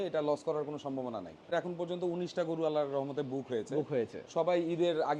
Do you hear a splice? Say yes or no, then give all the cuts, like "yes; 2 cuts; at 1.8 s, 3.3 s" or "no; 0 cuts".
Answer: yes; 1 cut; at 1.5 s